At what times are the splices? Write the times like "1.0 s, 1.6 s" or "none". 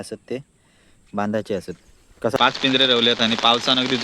2.3 s